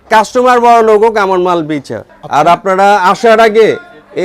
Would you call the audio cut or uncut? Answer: uncut